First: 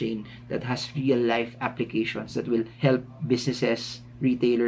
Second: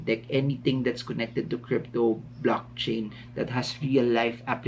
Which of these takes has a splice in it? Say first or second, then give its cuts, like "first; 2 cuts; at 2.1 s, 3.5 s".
first; 1 cut; at 2.7 s